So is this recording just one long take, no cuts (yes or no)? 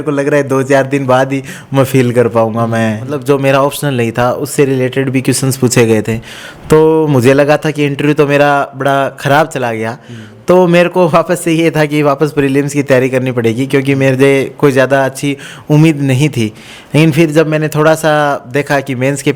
no